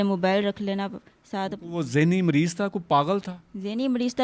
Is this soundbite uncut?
yes; 0 cuts

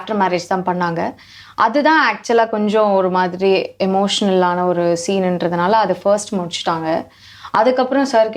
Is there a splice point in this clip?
no; 0 cuts

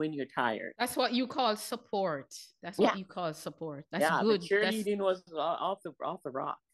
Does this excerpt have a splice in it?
no; 0 cuts

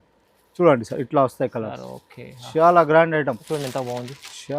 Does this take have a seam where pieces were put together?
yes; 1 cut; at 3.5 s

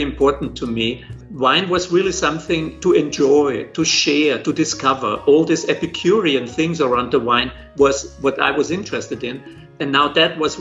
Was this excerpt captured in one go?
no; 1 cut; at 1.2 s

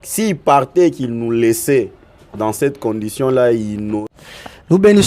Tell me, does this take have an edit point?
yes; 1 cut; at 4.0 s

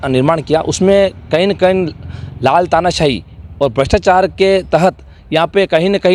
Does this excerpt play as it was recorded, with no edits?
yes; 0 cuts

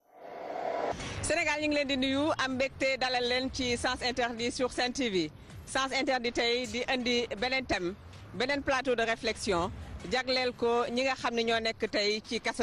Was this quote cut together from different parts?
yes; 1 cut; at 0.9 s

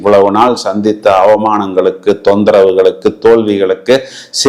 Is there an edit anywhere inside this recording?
no; 0 cuts

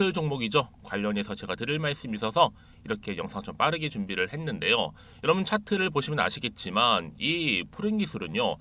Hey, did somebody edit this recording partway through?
no; 0 cuts

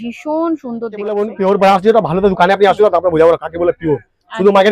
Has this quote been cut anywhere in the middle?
yes; 1 cut; at 1.1 s

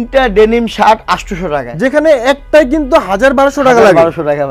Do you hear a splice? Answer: no; 0 cuts

